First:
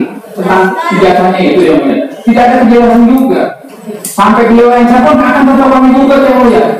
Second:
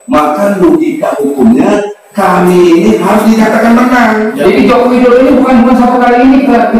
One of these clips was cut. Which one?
second; 1 cut; at 4.3 s

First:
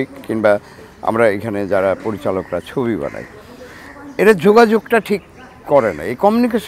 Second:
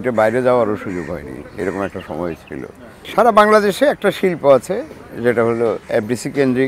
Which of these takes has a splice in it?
second; 1 cut; at 3.0 s

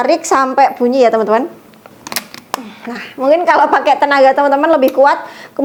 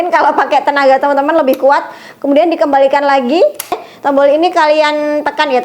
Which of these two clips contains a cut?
second; 1 cut; at 3.8 s

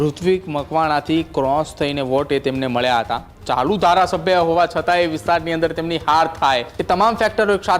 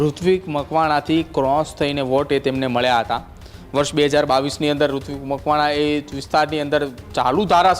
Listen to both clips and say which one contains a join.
first; 2 cuts; at 3.3 s, 6.7 s

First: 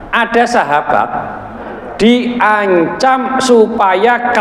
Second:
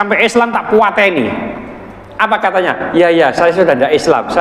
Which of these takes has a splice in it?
first; 1 cut; at 1.6 s

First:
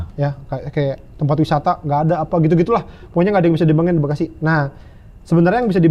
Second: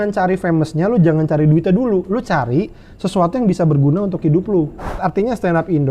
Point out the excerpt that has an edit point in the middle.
second; 1 cut; at 4.9 s

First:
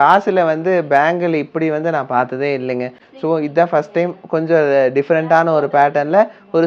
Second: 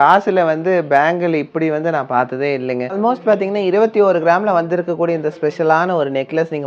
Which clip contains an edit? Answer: second; 1 cut; at 2.9 s

